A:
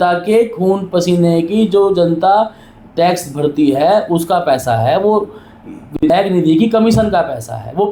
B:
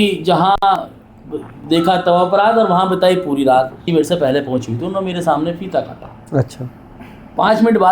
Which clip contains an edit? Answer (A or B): B